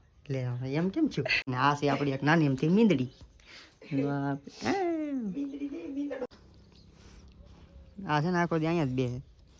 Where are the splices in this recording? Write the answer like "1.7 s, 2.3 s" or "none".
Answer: 1.4 s, 6.3 s